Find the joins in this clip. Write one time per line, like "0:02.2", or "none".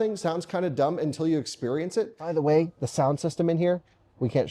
0:02.3